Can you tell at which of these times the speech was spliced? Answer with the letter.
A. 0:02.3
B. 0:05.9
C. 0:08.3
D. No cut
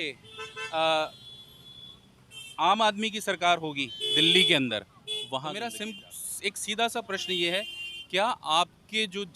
B